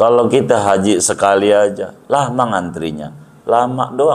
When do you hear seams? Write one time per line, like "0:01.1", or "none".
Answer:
none